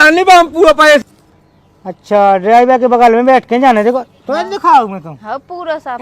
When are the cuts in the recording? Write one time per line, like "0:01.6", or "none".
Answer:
0:01.0